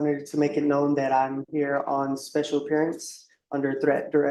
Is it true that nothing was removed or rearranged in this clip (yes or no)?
yes